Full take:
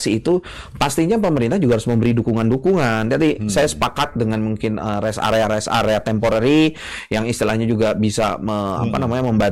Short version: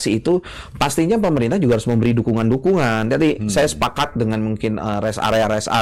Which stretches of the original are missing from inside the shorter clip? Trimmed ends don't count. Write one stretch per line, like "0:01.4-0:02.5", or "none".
none